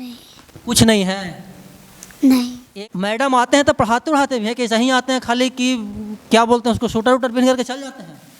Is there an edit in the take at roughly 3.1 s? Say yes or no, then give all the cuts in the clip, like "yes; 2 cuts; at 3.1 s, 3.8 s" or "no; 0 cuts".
yes; 1 cut; at 3.1 s